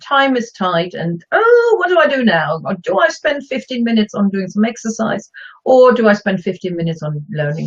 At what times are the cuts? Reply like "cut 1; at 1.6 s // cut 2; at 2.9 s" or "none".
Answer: cut 1; at 4.1 s